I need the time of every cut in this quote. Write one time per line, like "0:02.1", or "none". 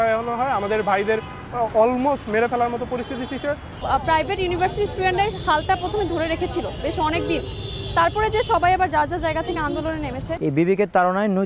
0:03.8
0:10.4